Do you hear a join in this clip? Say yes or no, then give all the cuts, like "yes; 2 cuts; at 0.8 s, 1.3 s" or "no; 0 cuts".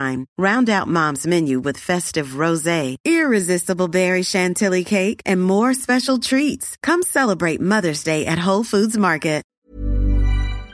yes; 1 cut; at 9.5 s